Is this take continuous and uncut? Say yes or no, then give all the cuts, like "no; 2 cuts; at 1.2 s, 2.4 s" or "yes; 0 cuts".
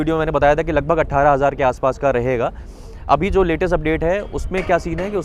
yes; 0 cuts